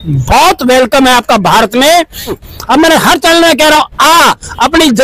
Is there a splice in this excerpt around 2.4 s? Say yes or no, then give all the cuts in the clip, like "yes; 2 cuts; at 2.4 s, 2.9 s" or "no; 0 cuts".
yes; 1 cut; at 2.4 s